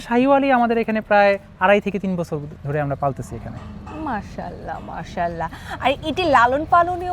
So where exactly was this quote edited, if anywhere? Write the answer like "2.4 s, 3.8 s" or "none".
none